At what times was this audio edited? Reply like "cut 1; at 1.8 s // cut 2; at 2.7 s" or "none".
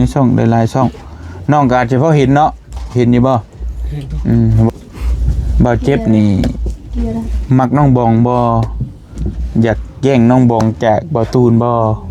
cut 1; at 4.7 s

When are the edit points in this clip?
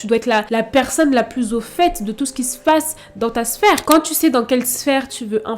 cut 1; at 3.8 s

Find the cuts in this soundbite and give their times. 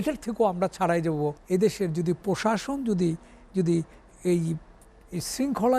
cut 1; at 1.4 s

